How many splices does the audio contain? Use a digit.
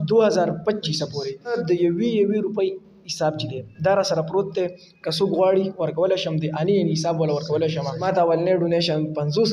2